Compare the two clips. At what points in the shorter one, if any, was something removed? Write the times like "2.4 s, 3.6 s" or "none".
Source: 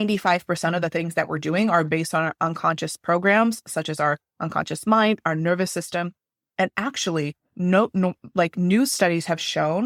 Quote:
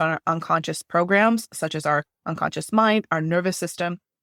none